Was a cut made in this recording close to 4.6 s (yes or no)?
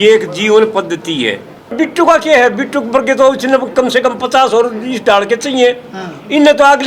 no